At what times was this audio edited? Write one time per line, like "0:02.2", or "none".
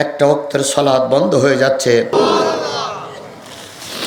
0:02.1